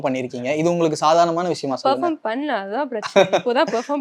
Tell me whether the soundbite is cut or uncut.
uncut